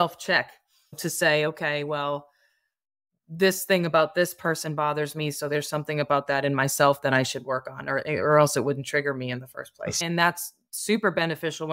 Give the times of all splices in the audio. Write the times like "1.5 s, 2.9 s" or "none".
0.9 s, 10.0 s